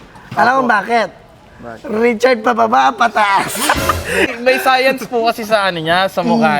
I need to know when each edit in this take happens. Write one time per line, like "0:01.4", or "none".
0:04.3